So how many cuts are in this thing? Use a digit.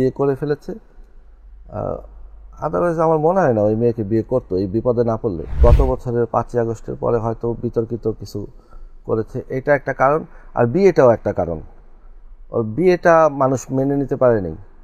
1